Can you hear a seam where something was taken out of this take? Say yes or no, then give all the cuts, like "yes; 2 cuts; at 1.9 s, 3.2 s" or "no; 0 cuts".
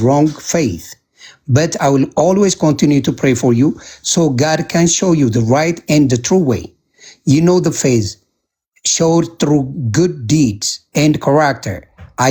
no; 0 cuts